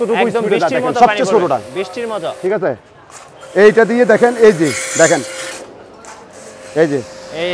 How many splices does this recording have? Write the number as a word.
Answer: one